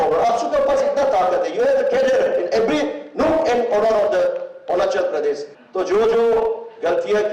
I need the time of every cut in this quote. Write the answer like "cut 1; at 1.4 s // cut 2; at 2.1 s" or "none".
cut 1; at 5.5 s